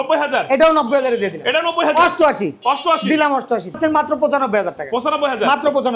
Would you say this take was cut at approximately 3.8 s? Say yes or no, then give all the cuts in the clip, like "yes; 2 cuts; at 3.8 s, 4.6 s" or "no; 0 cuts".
yes; 1 cut; at 3.8 s